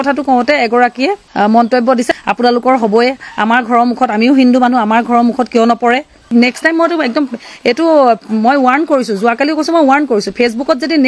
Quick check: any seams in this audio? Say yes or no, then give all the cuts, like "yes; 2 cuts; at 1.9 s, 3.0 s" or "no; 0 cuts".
yes; 3 cuts; at 1.2 s, 2.1 s, 6.3 s